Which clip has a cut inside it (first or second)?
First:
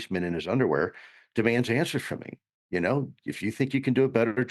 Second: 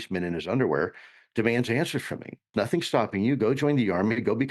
second